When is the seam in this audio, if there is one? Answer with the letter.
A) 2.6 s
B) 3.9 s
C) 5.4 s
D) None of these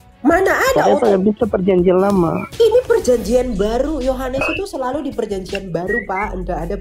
A